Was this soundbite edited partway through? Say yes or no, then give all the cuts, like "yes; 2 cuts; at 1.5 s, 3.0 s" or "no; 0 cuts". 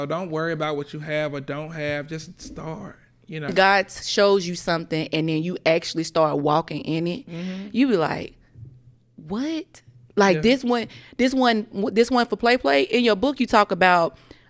yes; 1 cut; at 3.5 s